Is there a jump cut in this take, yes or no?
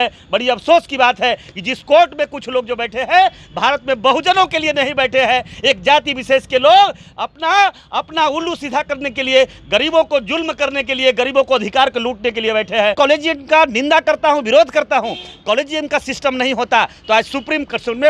yes